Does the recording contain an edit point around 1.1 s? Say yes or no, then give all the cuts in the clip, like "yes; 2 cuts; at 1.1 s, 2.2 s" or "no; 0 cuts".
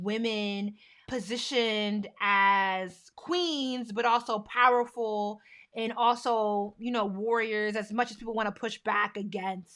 yes; 1 cut; at 1.1 s